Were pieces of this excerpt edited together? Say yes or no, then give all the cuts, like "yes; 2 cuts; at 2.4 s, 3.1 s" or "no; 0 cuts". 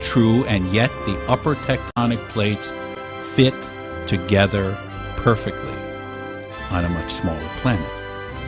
yes; 1 cut; at 4.2 s